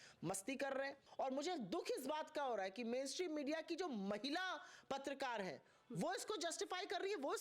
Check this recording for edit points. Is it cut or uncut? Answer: cut